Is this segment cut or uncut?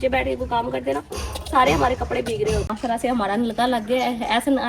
cut